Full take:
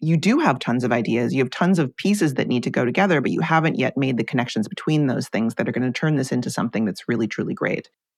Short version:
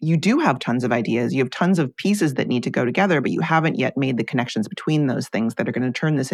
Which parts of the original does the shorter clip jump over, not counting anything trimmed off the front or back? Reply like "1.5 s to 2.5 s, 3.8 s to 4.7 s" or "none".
none